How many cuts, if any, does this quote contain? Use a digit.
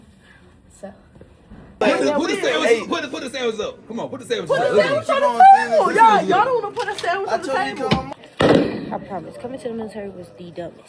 2